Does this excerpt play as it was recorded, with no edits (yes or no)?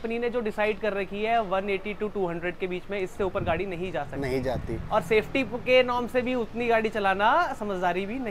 yes